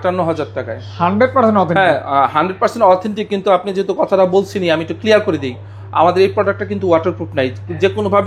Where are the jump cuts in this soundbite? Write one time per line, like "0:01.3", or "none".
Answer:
none

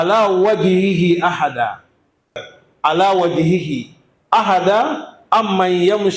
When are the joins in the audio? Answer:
0:02.5

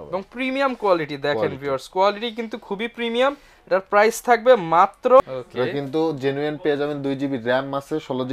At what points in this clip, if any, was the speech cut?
0:05.2

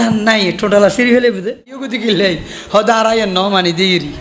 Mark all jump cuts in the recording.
0:01.9

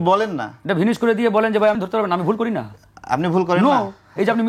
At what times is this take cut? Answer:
0:01.8

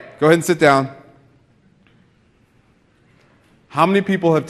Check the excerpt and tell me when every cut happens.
0:01.7

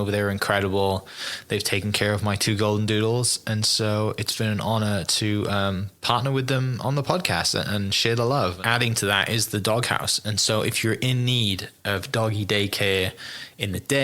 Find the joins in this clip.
0:08.6

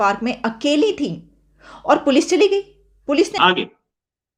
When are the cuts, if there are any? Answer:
0:03.4

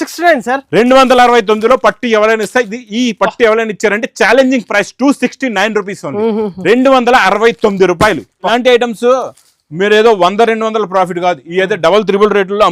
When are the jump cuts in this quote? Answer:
0:08.5

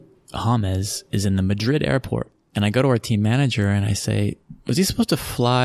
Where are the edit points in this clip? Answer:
0:02.4

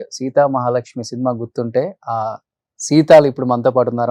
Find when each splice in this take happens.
none

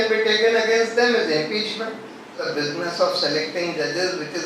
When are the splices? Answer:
0:02.4

